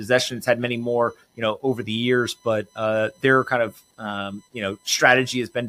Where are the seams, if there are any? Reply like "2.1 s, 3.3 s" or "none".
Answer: none